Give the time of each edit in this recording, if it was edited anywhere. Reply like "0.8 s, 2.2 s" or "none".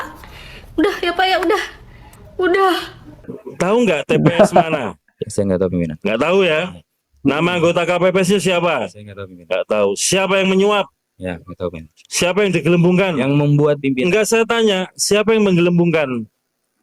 3.2 s